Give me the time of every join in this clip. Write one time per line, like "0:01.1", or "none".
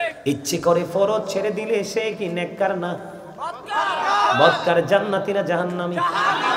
none